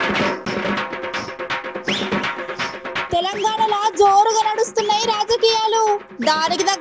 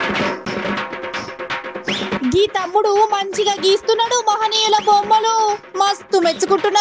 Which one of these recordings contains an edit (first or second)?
second